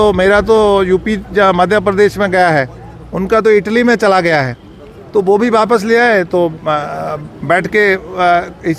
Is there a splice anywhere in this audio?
no; 0 cuts

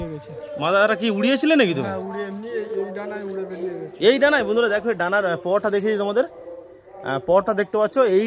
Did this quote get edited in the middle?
no; 0 cuts

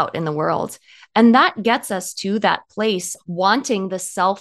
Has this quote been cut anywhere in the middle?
yes; 1 cut; at 3.1 s

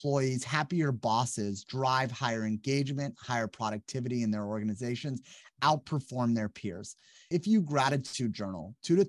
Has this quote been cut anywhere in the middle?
yes; 1 cut; at 7.2 s

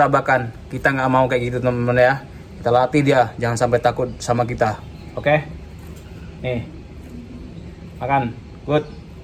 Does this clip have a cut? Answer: no; 0 cuts

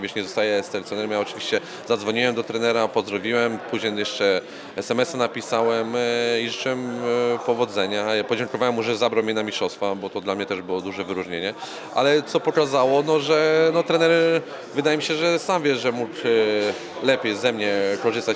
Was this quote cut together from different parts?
no; 0 cuts

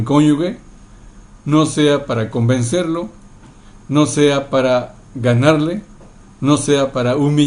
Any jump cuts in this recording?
no; 0 cuts

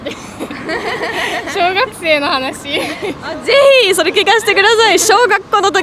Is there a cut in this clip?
no; 0 cuts

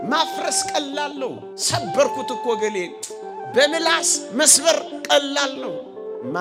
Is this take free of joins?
yes; 0 cuts

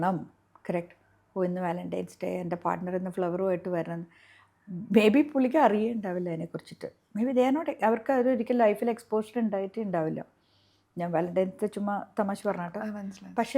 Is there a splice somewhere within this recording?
no; 0 cuts

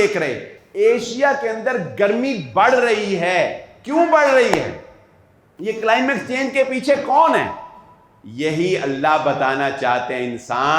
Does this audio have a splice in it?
no; 0 cuts

